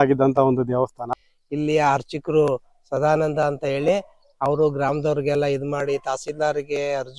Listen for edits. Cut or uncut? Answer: cut